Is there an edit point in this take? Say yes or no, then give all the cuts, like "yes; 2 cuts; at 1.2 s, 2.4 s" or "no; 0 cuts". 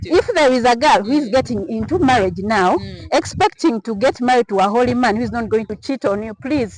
yes; 1 cut; at 5.7 s